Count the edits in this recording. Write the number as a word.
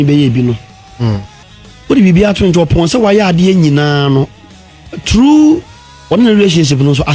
one